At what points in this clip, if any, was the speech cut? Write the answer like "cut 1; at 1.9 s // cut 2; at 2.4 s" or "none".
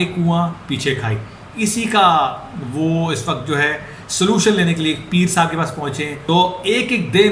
cut 1; at 6.1 s